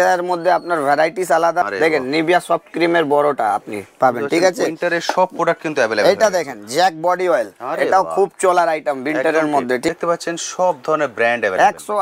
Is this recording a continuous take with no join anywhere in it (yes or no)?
no